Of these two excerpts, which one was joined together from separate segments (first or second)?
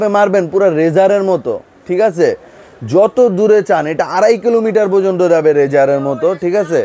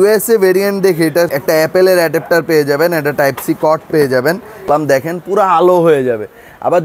second